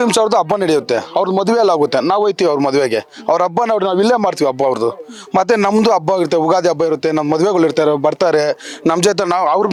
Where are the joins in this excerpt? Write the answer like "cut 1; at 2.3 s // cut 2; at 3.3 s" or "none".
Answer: none